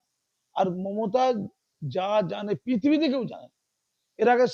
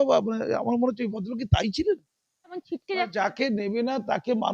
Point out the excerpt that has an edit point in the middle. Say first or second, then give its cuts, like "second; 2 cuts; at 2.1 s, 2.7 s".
second; 1 cut; at 2.6 s